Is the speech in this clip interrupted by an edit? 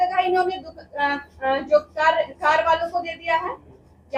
no; 0 cuts

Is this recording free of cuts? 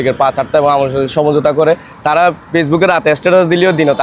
yes; 0 cuts

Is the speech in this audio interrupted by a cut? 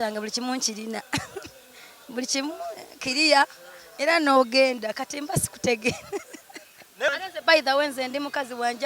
yes; 1 cut; at 7.1 s

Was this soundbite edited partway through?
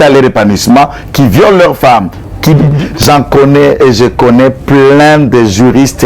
yes; 1 cut; at 2.8 s

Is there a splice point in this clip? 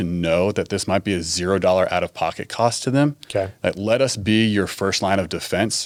no; 0 cuts

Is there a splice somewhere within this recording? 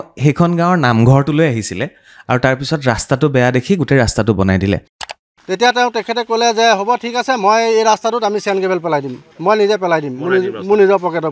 yes; 1 cut; at 4.9 s

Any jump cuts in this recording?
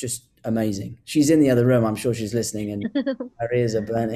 no; 0 cuts

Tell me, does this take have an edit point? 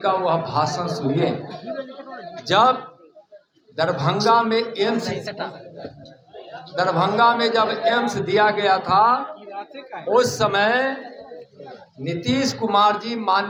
no; 0 cuts

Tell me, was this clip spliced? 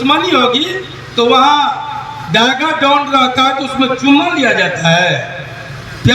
no; 0 cuts

